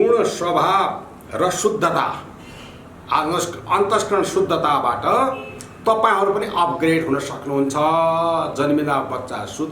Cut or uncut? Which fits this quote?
uncut